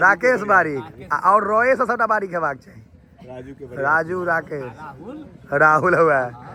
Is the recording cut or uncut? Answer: uncut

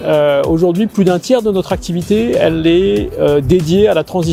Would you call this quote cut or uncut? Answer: uncut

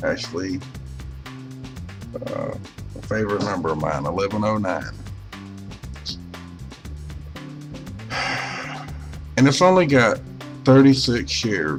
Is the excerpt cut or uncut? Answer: uncut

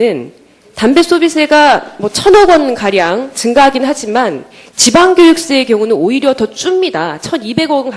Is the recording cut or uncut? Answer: cut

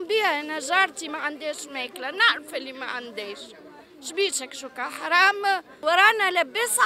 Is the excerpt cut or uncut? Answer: cut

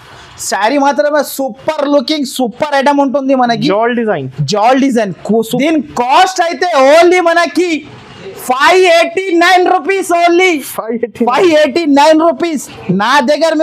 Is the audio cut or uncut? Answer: cut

